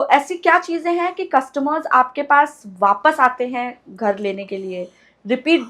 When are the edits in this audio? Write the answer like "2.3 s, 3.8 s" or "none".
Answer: none